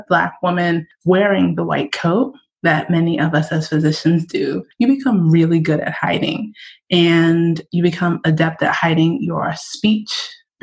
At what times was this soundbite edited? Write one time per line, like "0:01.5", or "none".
0:04.6